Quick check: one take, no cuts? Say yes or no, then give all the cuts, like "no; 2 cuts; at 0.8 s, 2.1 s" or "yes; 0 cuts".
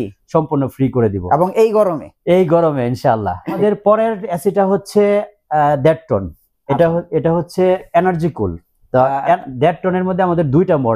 no; 1 cut; at 3.6 s